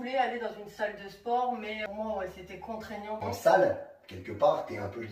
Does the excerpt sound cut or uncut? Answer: cut